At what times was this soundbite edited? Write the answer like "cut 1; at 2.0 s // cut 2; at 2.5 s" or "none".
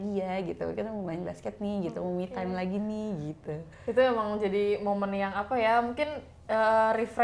none